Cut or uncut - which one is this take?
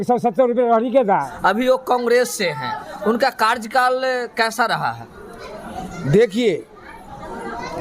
cut